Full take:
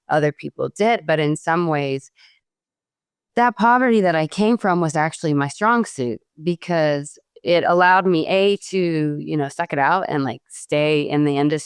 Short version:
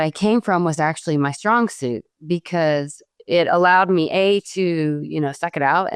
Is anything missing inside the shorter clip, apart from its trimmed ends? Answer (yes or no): no